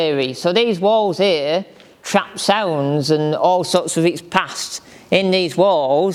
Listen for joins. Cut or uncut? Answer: uncut